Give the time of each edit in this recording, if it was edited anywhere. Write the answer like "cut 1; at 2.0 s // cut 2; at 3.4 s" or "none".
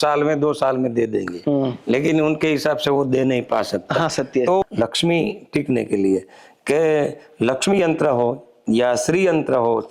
cut 1; at 4.6 s